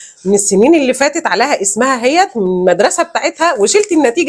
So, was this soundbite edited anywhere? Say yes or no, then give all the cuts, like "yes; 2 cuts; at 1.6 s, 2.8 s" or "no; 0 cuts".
no; 0 cuts